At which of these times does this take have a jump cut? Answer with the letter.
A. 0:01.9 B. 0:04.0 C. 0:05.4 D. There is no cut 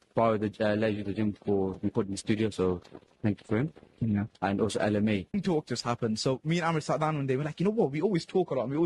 C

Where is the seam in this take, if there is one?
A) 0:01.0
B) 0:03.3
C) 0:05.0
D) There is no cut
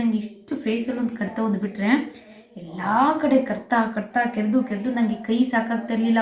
D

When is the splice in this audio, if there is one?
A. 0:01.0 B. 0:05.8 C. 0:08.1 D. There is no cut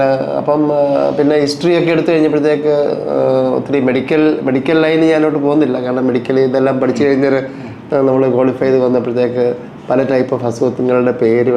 D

